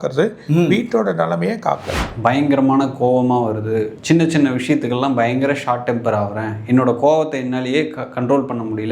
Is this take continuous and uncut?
no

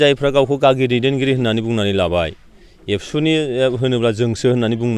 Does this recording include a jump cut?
no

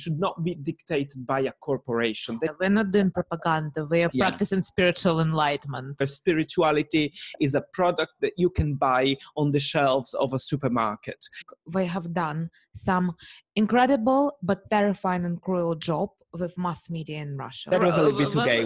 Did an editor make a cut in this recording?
yes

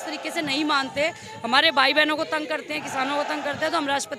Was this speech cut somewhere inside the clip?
no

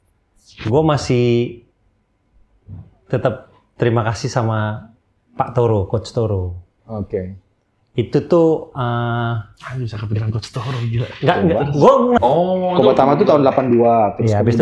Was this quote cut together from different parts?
yes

